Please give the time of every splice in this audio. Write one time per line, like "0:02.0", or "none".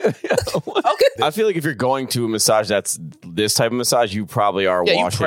0:01.2